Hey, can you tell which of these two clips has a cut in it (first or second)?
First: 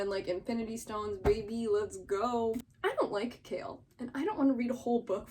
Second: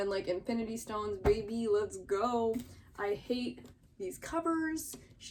first